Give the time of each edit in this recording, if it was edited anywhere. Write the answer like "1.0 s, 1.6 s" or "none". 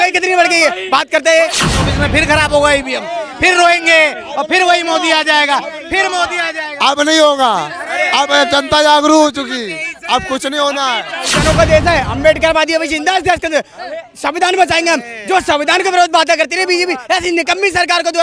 1.6 s, 11.3 s